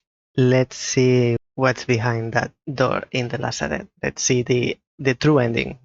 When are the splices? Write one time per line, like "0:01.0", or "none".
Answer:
0:01.4
0:02.6
0:03.9

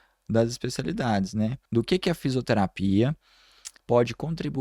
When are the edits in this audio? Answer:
0:01.6

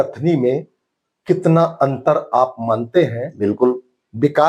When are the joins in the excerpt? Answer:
none

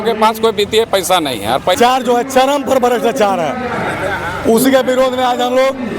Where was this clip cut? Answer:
0:01.8

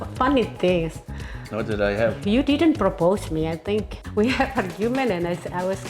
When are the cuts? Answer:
0:04.0

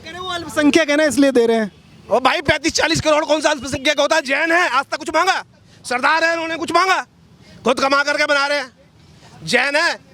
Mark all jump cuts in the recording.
none

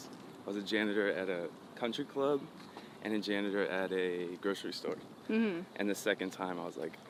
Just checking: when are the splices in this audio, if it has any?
none

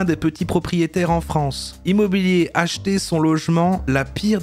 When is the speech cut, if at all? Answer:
0:01.7

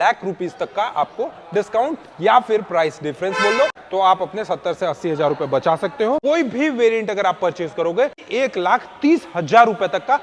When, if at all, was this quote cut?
0:03.8
0:06.2
0:08.2

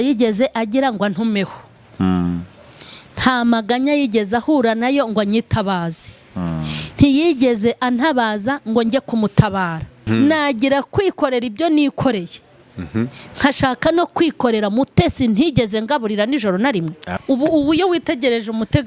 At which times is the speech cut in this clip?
0:09.9
0:17.0

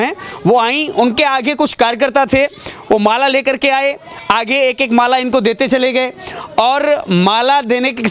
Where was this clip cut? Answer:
none

